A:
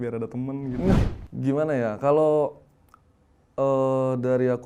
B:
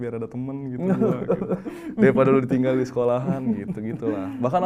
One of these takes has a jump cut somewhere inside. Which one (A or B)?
A